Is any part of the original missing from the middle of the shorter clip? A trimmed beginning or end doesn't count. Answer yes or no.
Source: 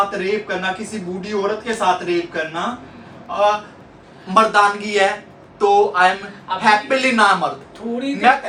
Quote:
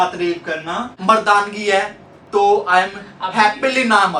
yes